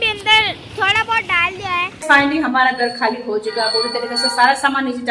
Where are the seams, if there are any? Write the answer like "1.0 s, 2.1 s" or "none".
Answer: 2.0 s